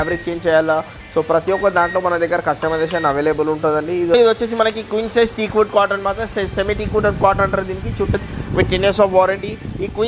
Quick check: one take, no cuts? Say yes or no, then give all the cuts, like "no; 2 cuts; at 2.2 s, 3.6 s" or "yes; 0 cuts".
no; 2 cuts; at 4.1 s, 8.1 s